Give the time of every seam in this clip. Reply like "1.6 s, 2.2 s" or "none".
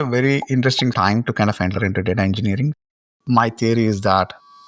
1.0 s, 3.1 s